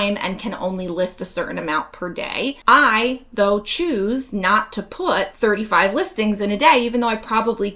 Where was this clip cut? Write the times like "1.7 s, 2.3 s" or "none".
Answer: 2.6 s, 5.3 s